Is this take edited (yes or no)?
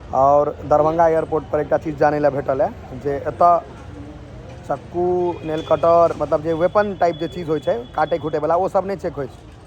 no